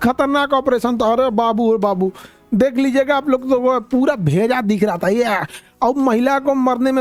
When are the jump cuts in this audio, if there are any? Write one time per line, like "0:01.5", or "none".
none